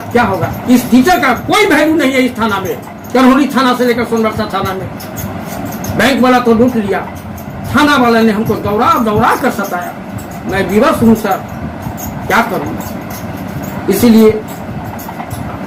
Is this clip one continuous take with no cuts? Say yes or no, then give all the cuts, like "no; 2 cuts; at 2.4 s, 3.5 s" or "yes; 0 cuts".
yes; 0 cuts